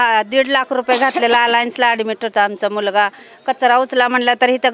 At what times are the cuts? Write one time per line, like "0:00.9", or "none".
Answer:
none